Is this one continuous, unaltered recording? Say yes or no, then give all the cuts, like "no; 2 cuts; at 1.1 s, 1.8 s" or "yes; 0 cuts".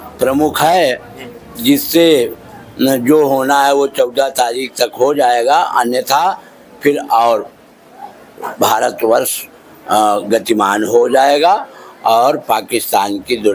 yes; 0 cuts